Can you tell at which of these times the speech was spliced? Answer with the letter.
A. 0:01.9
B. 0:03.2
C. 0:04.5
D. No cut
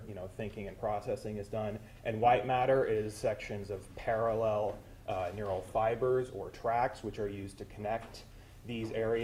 D